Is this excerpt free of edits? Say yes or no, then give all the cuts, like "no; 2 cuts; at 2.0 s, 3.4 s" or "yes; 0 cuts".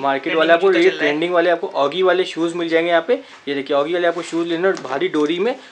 yes; 0 cuts